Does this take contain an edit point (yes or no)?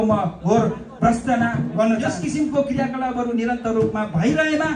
yes